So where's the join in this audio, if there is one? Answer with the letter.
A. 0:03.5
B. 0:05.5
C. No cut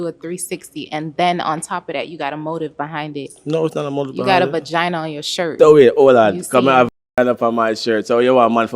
B